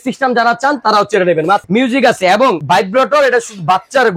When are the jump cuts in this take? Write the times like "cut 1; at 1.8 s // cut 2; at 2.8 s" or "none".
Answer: cut 1; at 1.6 s // cut 2; at 2.6 s